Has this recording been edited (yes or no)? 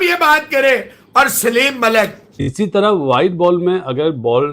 yes